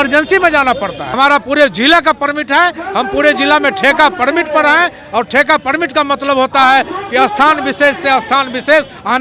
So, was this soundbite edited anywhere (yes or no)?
yes